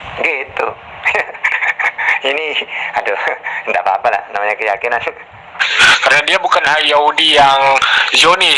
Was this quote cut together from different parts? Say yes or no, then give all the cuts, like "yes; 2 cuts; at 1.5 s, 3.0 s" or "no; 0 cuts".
yes; 1 cut; at 5.7 s